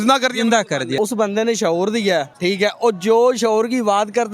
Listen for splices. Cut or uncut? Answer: cut